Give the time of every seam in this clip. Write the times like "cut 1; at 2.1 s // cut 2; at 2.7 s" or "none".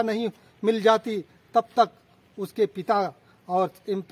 none